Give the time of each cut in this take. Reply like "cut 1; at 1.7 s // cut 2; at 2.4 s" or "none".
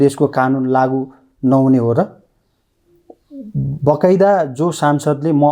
none